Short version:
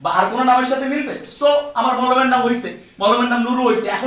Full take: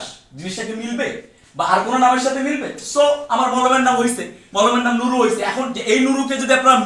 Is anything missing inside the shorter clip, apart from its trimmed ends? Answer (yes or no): no